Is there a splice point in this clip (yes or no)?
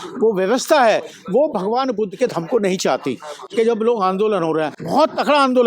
yes